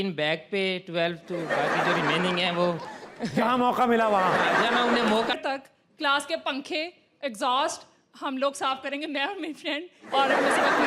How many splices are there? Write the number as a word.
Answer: one